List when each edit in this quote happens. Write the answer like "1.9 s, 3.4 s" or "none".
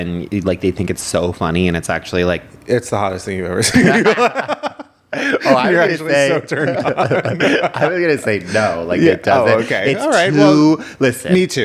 none